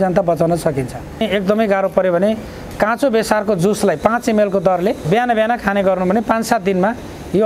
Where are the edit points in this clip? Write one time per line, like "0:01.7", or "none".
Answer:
0:01.2
0:05.0